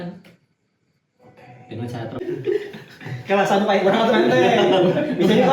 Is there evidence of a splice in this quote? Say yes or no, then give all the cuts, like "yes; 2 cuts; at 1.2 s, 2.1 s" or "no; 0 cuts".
yes; 1 cut; at 2.2 s